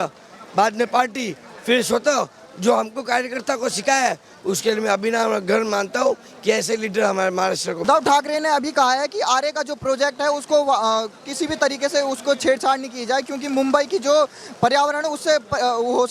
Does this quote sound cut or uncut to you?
cut